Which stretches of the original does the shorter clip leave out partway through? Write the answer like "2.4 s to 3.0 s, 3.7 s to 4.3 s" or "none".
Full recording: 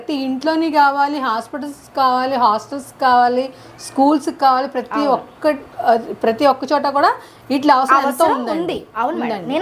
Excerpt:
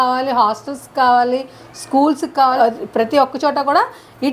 4.6 s to 5.8 s